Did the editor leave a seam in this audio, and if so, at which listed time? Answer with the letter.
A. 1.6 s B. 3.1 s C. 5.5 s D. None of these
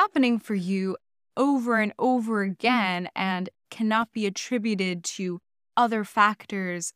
D